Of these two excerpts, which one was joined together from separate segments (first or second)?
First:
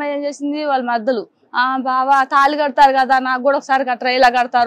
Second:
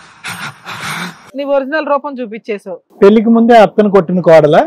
second